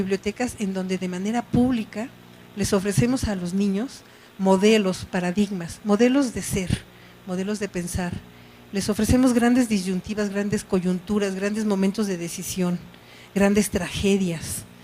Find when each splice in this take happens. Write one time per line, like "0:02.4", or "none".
0:06.3